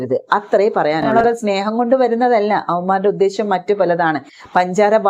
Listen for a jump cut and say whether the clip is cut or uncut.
cut